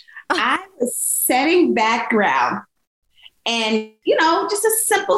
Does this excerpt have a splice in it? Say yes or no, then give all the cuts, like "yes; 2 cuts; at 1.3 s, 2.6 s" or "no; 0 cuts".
yes; 1 cut; at 4.0 s